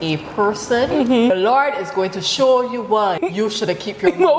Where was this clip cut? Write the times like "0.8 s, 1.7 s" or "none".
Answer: 1.3 s, 3.2 s